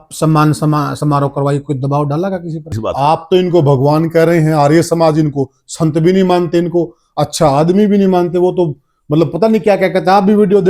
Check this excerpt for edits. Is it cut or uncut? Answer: cut